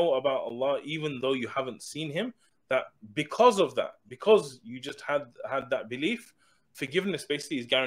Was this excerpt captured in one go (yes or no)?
no